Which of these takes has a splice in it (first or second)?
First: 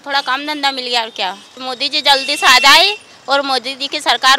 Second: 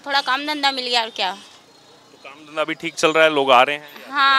first